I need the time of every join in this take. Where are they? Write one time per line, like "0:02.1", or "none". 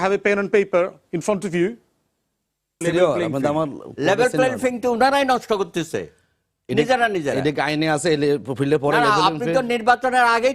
0:02.8